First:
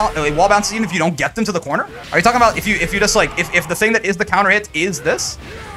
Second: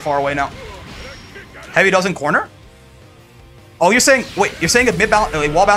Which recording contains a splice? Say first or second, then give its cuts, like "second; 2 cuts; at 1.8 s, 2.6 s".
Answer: first; 1 cut; at 2.0 s